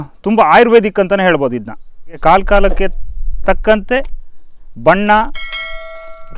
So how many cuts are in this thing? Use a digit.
1